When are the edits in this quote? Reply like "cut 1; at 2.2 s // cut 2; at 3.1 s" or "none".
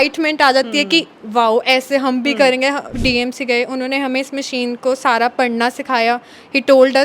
cut 1; at 2.9 s

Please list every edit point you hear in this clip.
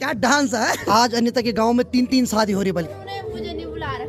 cut 1; at 0.8 s // cut 2; at 2.9 s

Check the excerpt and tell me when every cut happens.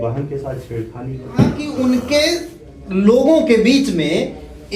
cut 1; at 1.6 s

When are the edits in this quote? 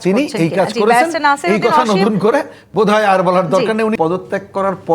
cut 1; at 3.9 s

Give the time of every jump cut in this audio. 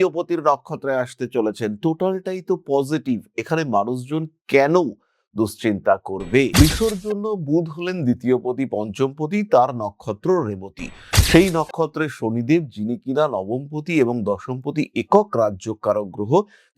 cut 1; at 6.5 s

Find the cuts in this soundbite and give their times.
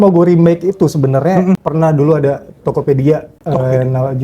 cut 1; at 1.6 s // cut 2; at 3.3 s

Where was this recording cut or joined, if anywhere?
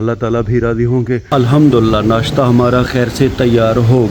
cut 1; at 1.2 s

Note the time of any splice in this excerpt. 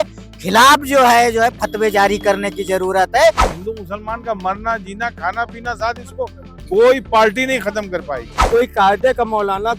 cut 1; at 3.5 s // cut 2; at 8.4 s

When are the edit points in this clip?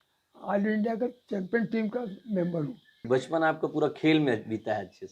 cut 1; at 2.9 s

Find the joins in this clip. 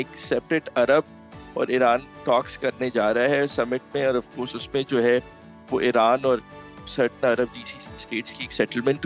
none

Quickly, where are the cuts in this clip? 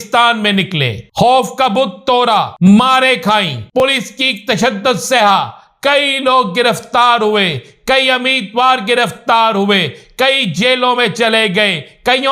cut 1; at 1.0 s // cut 2; at 2.5 s // cut 3; at 3.8 s

